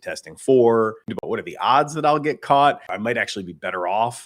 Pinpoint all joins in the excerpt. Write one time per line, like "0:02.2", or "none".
0:01.2
0:02.9